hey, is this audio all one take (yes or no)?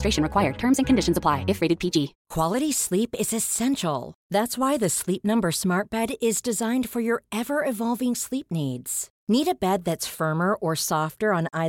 no